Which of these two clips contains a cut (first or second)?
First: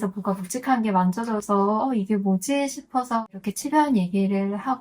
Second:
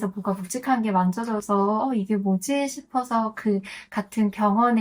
first